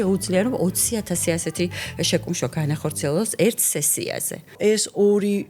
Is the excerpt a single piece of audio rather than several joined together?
no; 1 cut; at 4.5 s

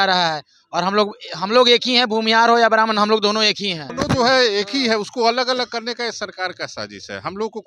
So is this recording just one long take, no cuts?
no; 1 cut; at 3.8 s

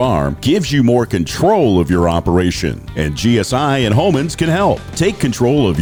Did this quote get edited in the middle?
no; 0 cuts

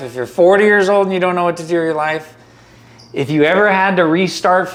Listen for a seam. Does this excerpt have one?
no; 0 cuts

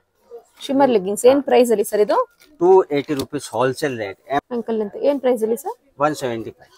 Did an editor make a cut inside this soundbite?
yes; 1 cut; at 4.4 s

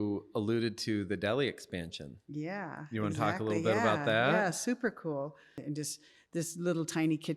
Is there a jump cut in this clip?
yes; 1 cut; at 5.6 s

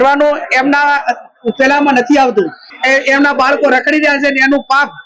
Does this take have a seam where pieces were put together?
yes; 1 cut; at 2.7 s

